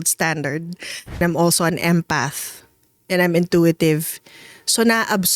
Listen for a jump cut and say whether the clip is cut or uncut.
cut